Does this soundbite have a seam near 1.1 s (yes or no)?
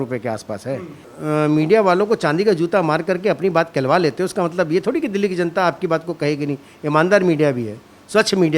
yes